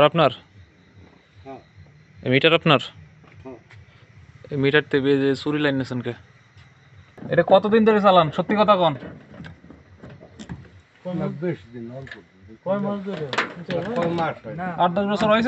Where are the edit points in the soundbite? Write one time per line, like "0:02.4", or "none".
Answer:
0:07.1